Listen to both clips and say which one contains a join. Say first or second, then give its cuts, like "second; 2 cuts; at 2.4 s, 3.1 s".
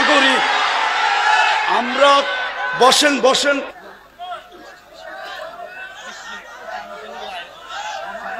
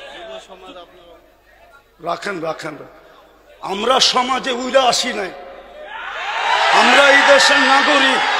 first; 1 cut; at 3.7 s